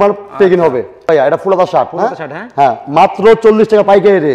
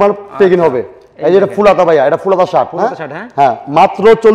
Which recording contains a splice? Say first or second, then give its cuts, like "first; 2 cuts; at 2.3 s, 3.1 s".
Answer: first; 1 cut; at 1.1 s